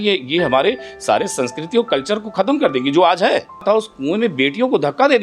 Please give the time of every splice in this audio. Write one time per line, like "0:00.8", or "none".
0:03.6